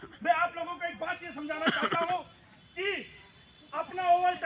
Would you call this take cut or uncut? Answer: uncut